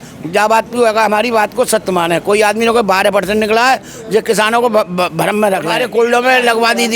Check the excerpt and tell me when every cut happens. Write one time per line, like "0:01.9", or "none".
0:05.8